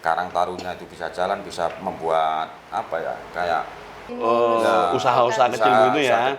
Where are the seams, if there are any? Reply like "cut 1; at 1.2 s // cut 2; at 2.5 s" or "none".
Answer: cut 1; at 4.0 s

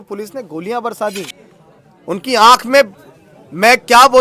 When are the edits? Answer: cut 1; at 1.9 s

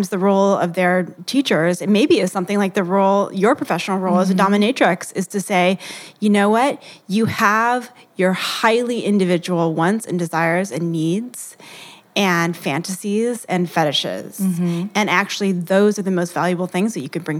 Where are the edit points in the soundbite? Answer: cut 1; at 1.2 s

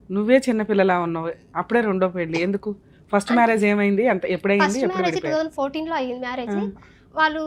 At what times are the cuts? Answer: none

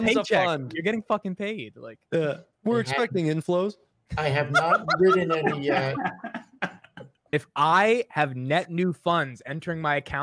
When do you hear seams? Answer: cut 1; at 2.5 s // cut 2; at 7.3 s

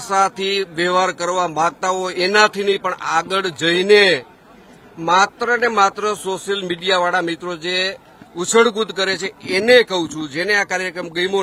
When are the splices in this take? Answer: none

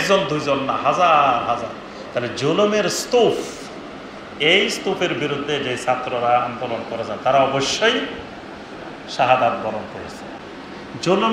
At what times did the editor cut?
cut 1; at 10.4 s

